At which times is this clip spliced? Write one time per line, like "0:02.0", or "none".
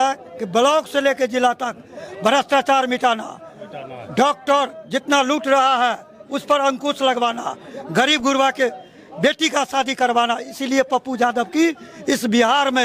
none